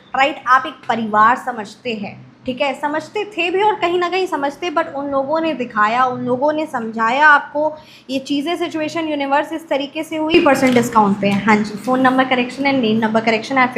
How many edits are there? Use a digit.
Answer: 1